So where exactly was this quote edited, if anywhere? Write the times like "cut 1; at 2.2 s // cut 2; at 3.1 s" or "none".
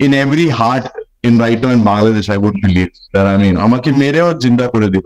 none